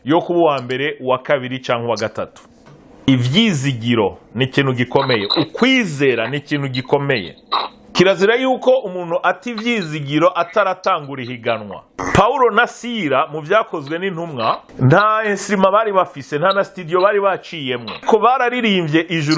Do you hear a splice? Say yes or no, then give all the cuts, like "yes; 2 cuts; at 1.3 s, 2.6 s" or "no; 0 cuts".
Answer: yes; 5 cuts; at 3.1 s, 7.9 s, 12.0 s, 14.7 s, 18.0 s